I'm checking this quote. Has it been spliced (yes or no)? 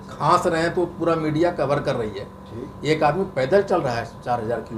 no